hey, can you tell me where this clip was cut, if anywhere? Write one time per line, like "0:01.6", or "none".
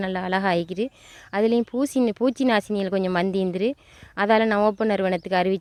none